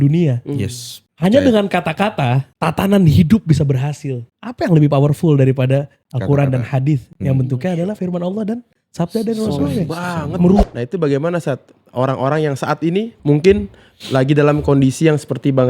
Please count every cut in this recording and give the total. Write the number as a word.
two